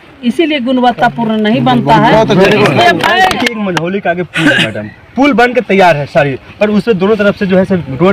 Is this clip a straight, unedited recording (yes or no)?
no